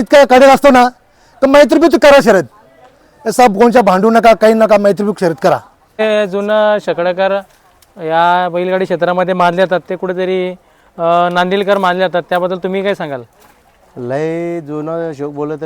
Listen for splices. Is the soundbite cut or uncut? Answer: cut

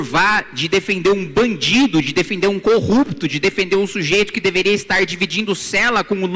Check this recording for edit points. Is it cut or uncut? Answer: uncut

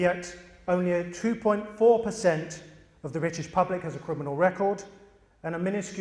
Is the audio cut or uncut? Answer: uncut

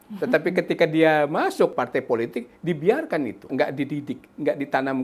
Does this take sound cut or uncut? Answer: cut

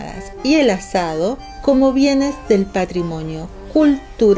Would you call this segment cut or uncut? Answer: cut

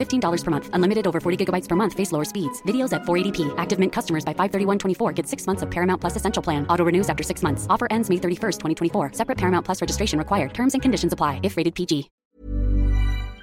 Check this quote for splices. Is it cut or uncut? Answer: cut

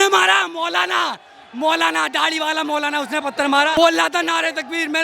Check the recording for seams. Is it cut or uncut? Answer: cut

